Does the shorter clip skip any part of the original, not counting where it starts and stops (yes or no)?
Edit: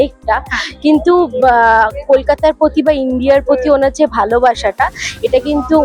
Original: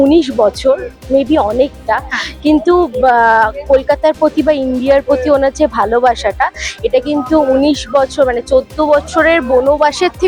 no